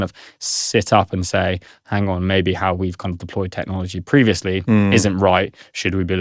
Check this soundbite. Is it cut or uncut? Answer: uncut